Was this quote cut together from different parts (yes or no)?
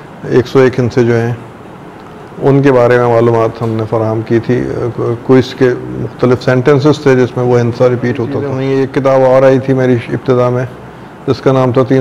yes